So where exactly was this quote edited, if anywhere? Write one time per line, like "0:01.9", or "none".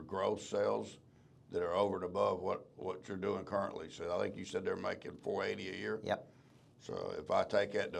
none